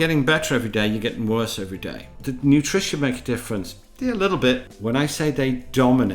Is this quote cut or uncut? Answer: cut